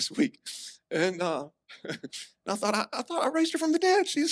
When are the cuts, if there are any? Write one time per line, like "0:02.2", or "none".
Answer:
0:01.6

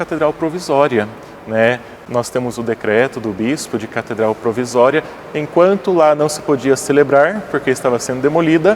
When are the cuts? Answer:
0:01.9

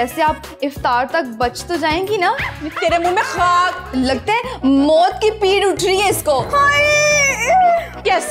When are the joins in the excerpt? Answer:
0:03.8

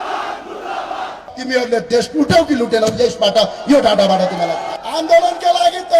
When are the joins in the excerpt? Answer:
0:01.3
0:04.7

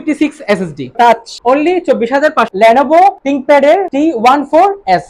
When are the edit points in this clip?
0:00.9
0:02.5
0:03.4

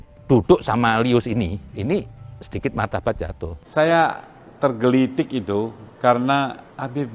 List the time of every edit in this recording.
0:03.6

